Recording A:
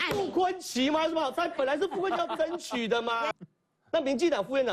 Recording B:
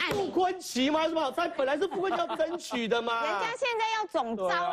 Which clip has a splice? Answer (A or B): A